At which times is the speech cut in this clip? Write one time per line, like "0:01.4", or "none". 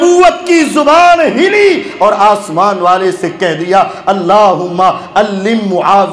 none